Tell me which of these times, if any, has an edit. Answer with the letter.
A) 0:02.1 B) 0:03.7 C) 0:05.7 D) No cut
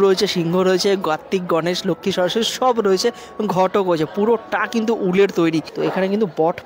C